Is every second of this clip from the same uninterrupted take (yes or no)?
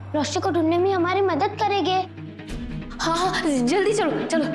yes